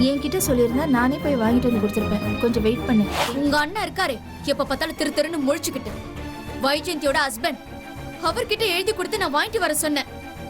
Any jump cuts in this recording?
yes; 1 cut; at 3.2 s

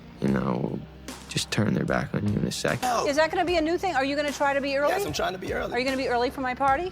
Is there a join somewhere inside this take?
yes; 1 cut; at 2.8 s

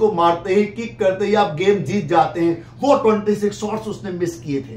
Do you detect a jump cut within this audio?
no; 0 cuts

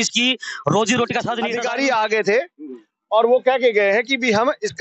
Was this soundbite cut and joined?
yes; 1 cut; at 1.5 s

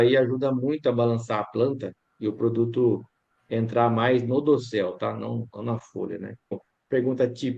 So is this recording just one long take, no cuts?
no; 1 cut; at 6.6 s

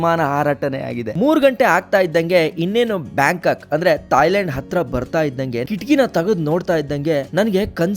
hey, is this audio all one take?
no; 1 cut; at 1.1 s

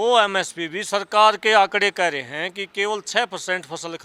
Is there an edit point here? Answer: no; 0 cuts

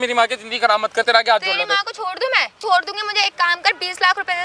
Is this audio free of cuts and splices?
no; 1 cut; at 2.6 s

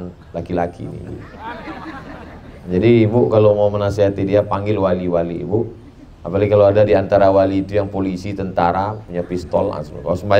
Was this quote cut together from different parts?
no; 0 cuts

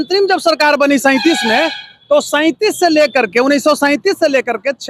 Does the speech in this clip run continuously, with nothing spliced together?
yes; 0 cuts

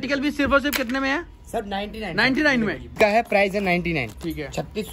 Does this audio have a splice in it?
yes; 1 cut; at 2.9 s

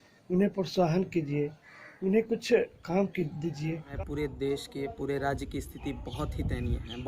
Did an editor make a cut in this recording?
yes; 1 cut; at 3.9 s

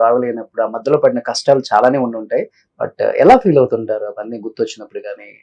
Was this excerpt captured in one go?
yes; 0 cuts

